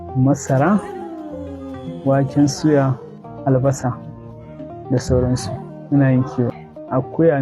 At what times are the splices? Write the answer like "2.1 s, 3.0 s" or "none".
5.5 s, 6.5 s